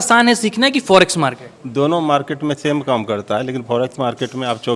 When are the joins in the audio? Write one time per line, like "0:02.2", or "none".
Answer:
none